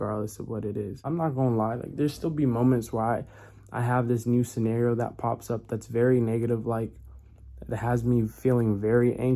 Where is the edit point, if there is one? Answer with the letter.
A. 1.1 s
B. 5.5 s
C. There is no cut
A